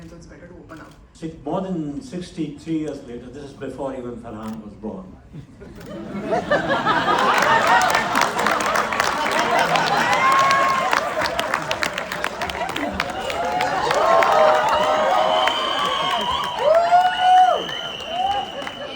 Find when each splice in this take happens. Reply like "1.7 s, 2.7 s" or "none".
1.0 s